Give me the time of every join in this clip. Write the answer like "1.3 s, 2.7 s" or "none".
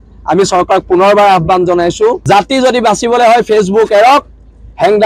2.2 s